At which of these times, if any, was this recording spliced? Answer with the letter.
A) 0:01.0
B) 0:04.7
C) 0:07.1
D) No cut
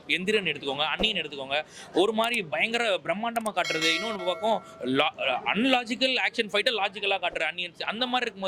D